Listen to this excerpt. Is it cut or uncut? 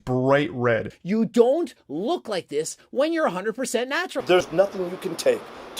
cut